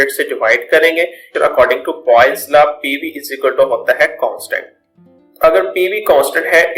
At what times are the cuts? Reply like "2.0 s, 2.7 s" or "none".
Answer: 1.3 s